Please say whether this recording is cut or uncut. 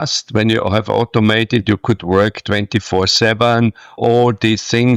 uncut